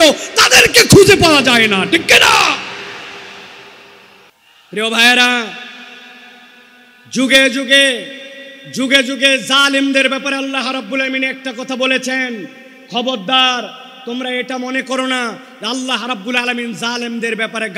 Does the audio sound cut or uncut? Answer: cut